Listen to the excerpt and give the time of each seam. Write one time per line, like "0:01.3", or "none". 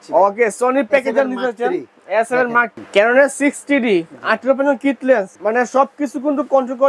0:02.8